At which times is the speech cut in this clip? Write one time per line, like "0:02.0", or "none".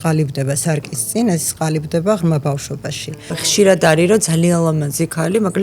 0:03.5